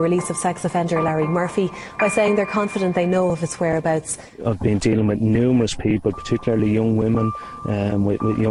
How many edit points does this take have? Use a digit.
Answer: 1